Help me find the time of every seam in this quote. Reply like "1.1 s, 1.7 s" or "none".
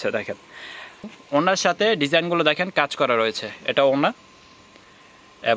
1.2 s